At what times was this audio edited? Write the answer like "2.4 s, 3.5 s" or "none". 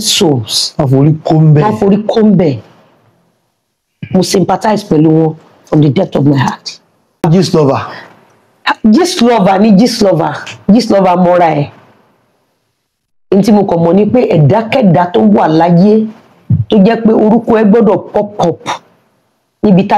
7.2 s